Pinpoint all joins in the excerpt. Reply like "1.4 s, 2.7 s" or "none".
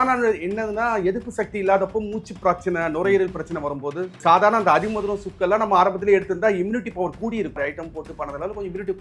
4.2 s, 7.6 s